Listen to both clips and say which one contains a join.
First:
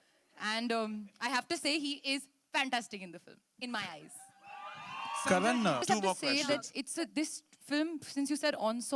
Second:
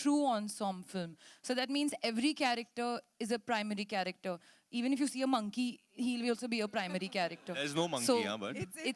first; 1 cut; at 5.8 s

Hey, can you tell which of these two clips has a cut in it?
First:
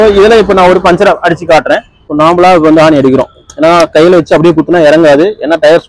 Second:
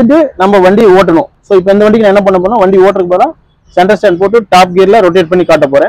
first; 1 cut; at 2.0 s

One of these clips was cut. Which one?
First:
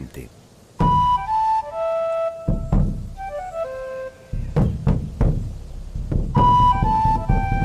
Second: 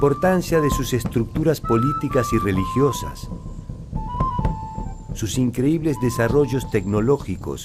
second; 1 cut; at 5.0 s

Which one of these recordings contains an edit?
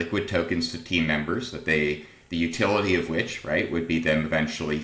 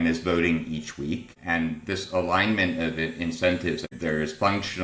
second; 2 cuts; at 1.3 s, 3.9 s

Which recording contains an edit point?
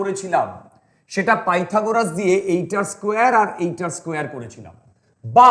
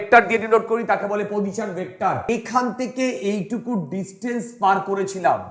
second; 1 cut; at 2.3 s

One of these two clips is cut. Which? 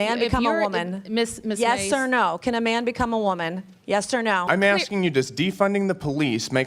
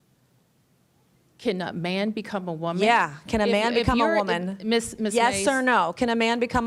first; 1 cut; at 4.4 s

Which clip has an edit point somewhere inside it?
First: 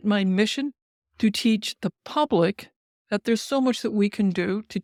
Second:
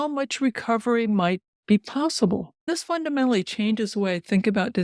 second; 1 cut; at 2.7 s

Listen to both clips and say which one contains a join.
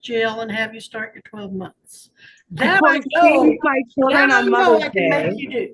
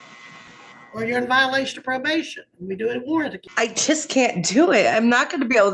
second; 1 cut; at 3.4 s

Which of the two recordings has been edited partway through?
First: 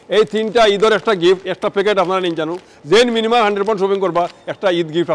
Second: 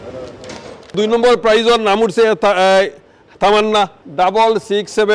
second; 2 cuts; at 1.0 s, 4.0 s

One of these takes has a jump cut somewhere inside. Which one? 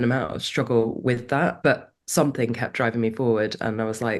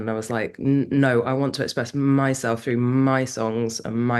first; 1 cut; at 1.6 s

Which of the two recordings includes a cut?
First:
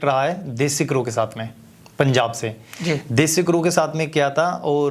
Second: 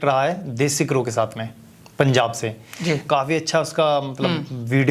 second; 1 cut; at 3.0 s

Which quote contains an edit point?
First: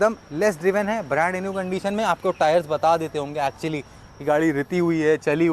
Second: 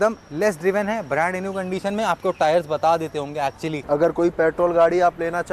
second; 1 cut; at 3.7 s

